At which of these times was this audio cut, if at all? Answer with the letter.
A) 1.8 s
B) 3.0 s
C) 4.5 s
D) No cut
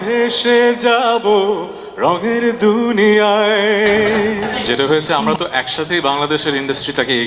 C